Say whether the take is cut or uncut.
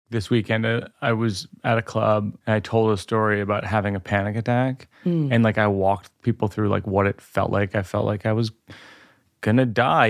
cut